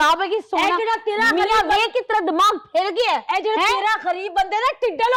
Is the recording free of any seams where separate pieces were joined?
yes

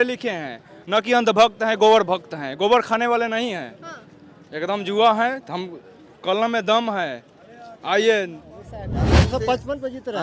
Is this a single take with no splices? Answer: no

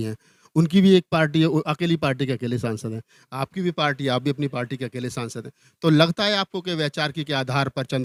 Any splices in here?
no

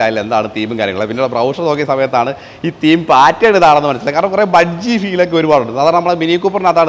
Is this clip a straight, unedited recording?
yes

